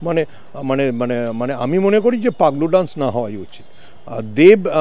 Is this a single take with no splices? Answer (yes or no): yes